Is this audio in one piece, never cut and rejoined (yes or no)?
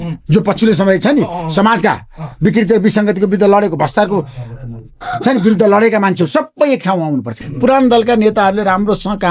no